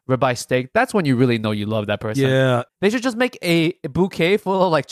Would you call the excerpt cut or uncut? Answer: cut